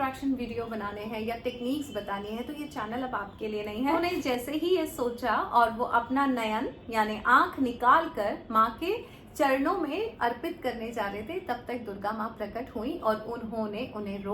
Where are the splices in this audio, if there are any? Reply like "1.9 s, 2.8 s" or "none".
3.9 s